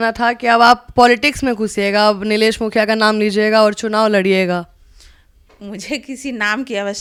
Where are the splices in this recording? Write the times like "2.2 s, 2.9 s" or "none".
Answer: none